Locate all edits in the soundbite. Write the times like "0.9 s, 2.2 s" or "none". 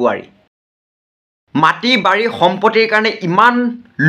1.1 s